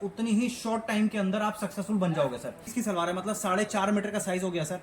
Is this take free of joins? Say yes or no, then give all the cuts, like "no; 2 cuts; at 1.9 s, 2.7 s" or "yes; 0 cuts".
no; 1 cut; at 2.7 s